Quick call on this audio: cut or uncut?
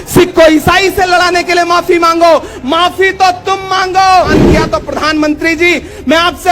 cut